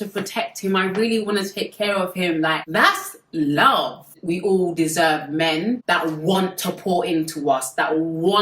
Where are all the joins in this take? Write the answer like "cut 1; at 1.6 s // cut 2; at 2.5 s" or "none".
cut 1; at 4.2 s